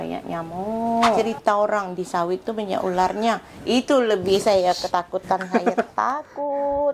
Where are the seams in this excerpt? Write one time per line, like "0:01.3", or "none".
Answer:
0:01.2